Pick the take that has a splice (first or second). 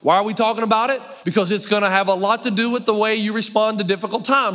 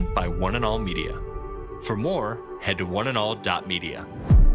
first